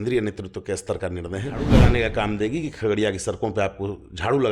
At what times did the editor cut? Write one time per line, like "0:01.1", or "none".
0:01.7